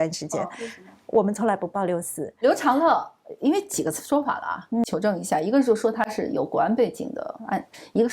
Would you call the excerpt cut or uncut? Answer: cut